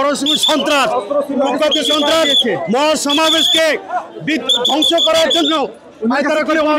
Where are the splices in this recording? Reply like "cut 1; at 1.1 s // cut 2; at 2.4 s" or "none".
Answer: none